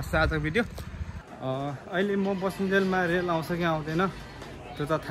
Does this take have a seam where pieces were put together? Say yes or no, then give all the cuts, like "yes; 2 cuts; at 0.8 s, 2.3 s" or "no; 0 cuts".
yes; 1 cut; at 1.2 s